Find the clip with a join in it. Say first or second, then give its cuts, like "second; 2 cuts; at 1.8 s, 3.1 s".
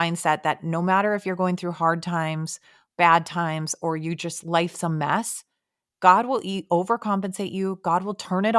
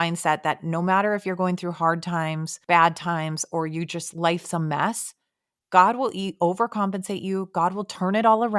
second; 1 cut; at 2.5 s